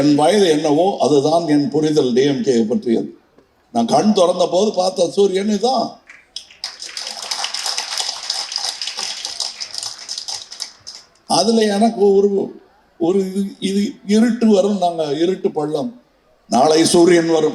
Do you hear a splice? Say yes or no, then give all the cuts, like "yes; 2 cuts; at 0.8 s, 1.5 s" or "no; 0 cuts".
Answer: no; 0 cuts